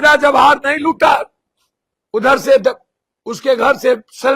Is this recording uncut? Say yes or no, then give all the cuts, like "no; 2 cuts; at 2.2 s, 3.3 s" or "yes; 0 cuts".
yes; 0 cuts